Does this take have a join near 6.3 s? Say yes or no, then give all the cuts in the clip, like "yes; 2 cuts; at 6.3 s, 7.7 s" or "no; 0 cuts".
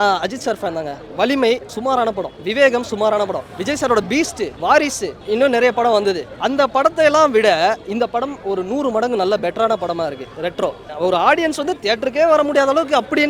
yes; 6 cuts; at 2.0 s, 3.5 s, 4.5 s, 5.2 s, 6.3 s, 10.9 s